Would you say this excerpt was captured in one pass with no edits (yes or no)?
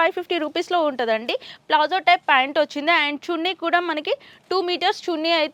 yes